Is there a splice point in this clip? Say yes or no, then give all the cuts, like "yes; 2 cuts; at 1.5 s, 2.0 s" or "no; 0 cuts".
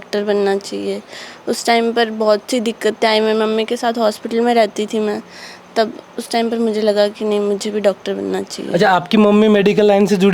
no; 0 cuts